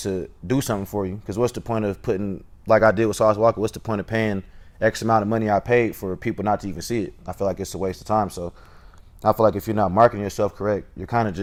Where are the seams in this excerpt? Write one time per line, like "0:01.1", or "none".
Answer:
none